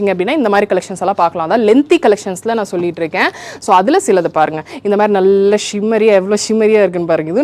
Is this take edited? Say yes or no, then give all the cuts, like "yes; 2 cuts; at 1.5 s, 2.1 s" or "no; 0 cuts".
no; 0 cuts